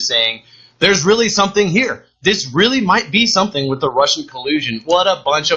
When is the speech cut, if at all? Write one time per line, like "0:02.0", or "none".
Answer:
0:01.0